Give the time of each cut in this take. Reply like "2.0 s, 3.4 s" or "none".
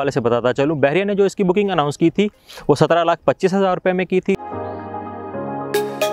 4.4 s

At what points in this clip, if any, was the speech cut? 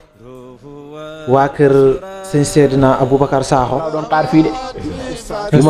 4.0 s

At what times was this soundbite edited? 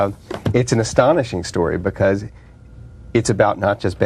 1.5 s

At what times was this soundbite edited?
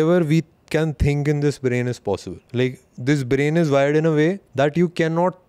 2.4 s, 4.4 s

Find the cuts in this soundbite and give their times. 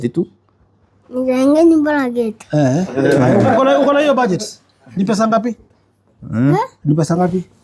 none

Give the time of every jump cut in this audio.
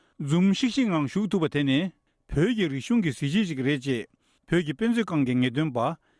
none

